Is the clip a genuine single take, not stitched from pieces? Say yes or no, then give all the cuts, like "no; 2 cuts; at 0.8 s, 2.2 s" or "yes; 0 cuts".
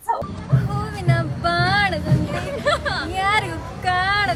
yes; 0 cuts